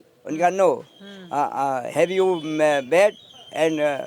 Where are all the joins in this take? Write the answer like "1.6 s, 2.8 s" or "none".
none